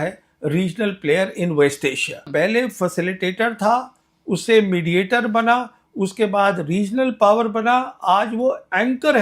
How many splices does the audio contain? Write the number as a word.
one